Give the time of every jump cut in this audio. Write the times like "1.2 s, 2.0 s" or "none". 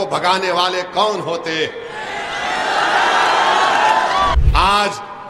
4.4 s